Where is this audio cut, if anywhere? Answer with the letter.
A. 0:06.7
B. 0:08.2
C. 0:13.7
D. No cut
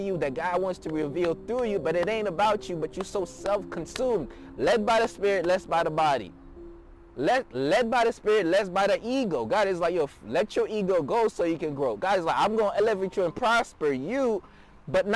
D